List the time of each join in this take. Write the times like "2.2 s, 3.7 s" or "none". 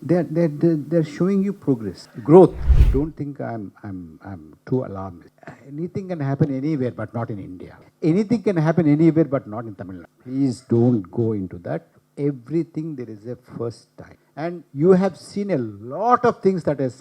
2.7 s